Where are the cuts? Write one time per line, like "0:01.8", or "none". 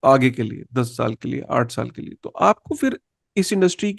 none